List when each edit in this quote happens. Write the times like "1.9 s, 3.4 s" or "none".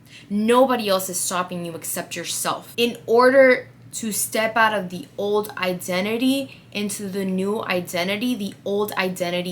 2.7 s